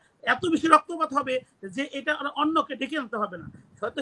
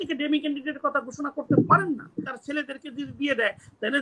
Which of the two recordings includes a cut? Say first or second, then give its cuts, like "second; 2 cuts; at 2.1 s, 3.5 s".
second; 1 cut; at 2.3 s